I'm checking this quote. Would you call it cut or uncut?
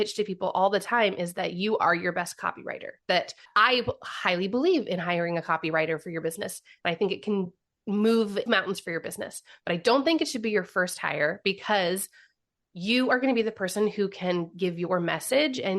cut